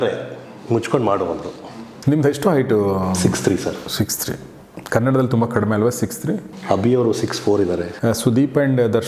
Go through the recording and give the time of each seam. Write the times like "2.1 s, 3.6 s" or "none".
1.5 s, 6.7 s, 7.9 s